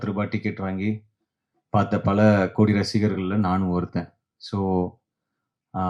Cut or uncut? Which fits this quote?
uncut